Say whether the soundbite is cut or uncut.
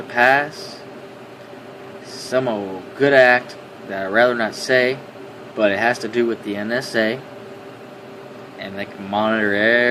cut